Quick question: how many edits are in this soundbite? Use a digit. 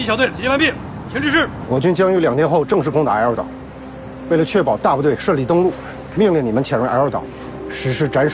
1